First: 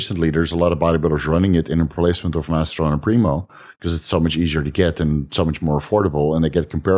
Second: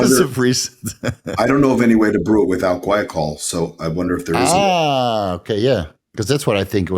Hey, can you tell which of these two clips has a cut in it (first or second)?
second